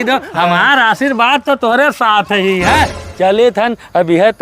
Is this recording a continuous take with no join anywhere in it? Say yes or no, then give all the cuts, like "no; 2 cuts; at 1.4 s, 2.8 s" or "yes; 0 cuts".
no; 1 cut; at 2.9 s